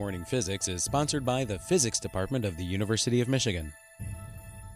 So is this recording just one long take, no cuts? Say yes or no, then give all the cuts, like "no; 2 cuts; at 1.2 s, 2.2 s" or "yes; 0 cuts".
no; 1 cut; at 3.8 s